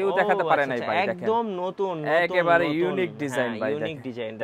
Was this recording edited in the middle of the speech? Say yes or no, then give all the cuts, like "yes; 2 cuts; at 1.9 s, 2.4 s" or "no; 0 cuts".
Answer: no; 0 cuts